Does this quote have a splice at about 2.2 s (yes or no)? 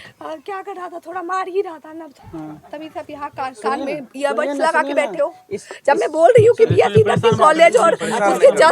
yes